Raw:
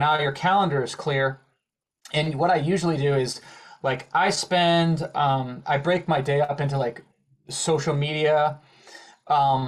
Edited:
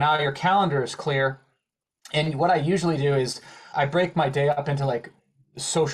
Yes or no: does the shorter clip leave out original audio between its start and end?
yes